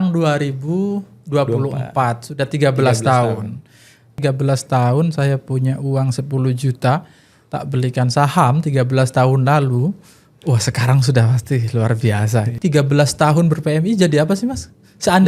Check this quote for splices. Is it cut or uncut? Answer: cut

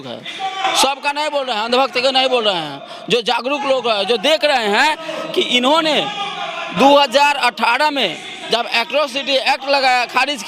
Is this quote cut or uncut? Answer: uncut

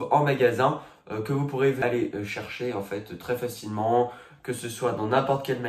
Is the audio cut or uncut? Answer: cut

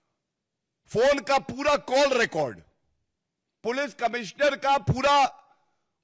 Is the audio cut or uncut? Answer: uncut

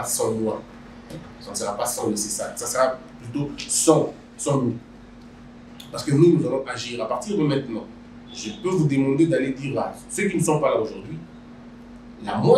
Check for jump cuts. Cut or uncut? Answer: uncut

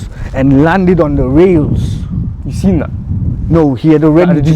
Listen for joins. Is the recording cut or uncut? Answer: uncut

